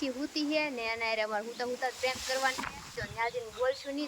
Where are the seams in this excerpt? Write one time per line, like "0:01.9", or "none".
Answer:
0:03.0